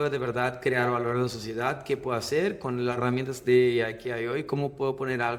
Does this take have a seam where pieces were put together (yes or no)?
no